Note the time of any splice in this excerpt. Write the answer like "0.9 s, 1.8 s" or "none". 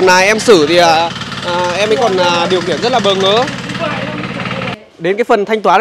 4.8 s